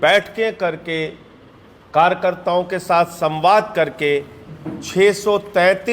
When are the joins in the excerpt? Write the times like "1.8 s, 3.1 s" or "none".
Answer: none